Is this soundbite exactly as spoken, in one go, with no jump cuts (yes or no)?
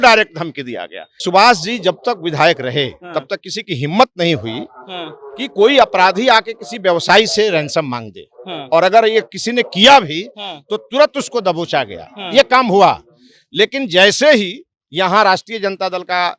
no